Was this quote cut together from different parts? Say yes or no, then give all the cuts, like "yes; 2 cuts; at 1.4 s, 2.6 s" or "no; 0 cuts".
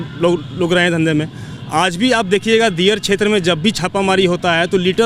no; 0 cuts